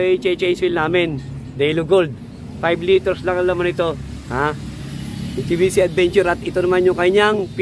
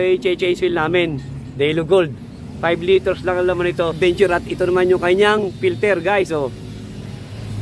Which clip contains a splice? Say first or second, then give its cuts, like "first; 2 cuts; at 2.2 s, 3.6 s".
second; 1 cut; at 4.0 s